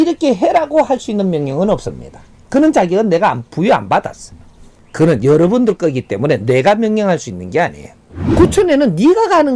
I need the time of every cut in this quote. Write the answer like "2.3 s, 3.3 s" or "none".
8.2 s